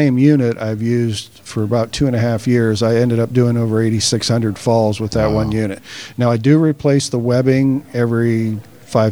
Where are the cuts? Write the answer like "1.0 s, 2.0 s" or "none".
none